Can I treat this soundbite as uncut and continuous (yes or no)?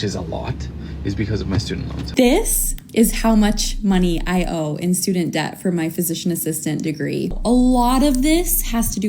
no